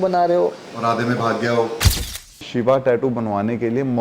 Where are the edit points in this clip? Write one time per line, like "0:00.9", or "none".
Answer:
0:02.2